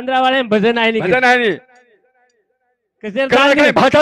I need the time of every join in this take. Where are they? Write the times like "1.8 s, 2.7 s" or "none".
none